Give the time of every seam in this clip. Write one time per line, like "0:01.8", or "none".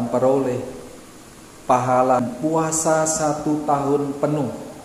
0:02.2